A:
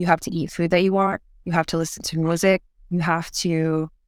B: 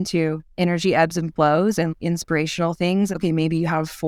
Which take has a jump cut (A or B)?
B